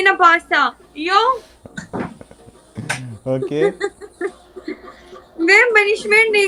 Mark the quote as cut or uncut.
uncut